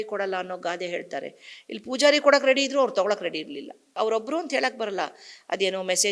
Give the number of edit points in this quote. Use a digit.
1